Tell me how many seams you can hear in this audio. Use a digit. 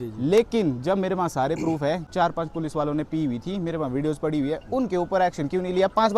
1